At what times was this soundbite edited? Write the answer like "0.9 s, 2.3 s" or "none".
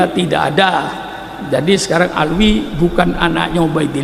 none